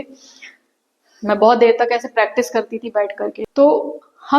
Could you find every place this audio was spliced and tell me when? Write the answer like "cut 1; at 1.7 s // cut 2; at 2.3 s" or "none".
cut 1; at 3.4 s